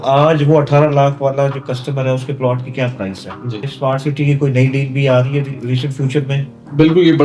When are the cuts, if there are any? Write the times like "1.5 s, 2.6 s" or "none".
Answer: 3.7 s